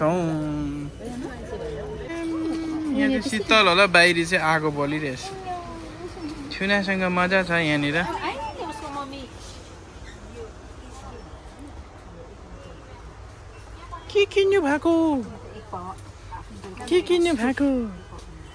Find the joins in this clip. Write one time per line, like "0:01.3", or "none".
0:02.2